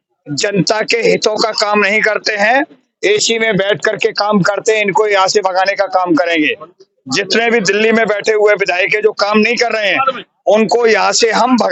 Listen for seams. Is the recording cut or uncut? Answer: uncut